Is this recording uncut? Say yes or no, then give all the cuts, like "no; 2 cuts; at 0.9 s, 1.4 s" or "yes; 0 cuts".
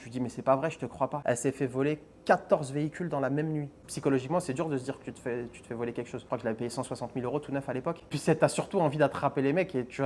no; 3 cuts; at 1.2 s, 3.8 s, 6.3 s